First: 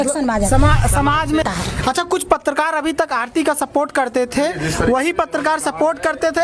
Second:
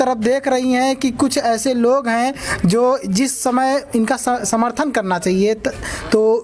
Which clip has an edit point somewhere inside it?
first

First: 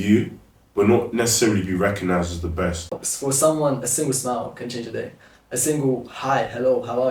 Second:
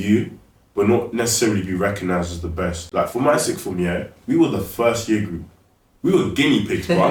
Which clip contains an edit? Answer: first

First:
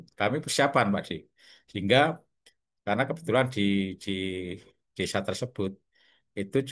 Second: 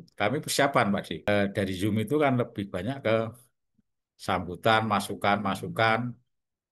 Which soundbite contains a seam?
second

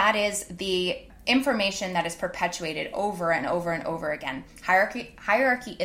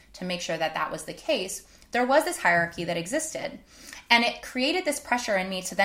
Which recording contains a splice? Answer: first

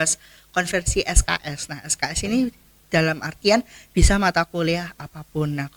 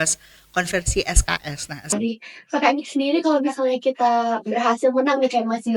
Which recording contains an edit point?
second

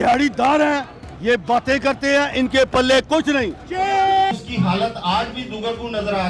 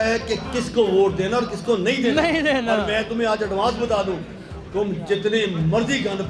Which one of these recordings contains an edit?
first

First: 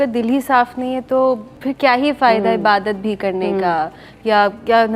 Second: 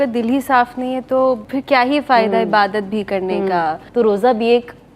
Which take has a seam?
second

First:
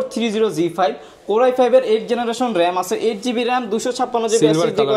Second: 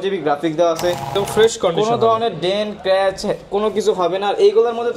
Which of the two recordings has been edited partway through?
second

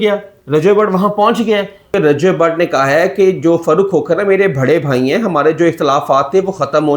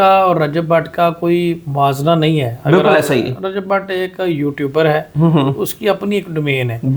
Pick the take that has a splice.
first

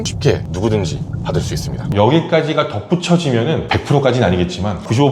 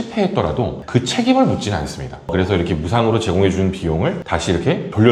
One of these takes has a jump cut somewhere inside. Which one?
first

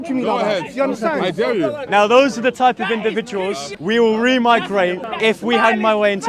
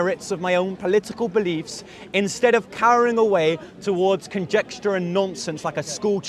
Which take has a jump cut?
first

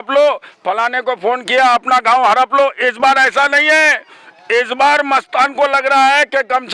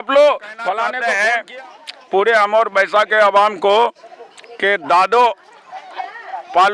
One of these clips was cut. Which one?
second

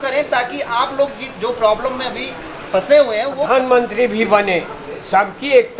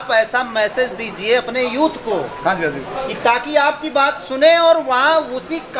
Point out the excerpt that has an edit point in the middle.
first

